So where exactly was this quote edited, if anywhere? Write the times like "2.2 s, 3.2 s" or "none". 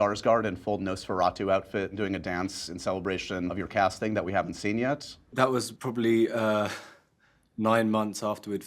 1.9 s, 3.5 s, 5.2 s